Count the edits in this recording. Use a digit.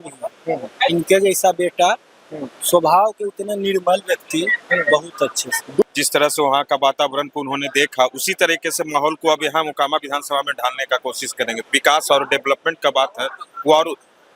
2